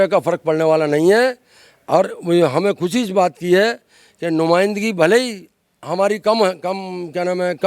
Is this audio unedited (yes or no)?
yes